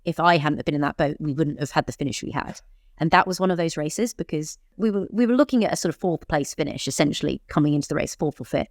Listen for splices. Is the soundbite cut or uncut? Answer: cut